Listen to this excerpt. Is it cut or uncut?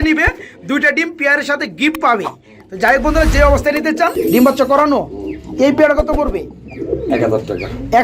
cut